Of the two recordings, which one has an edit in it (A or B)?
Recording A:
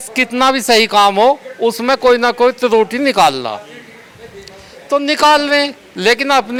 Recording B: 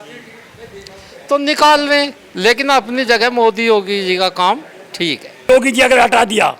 B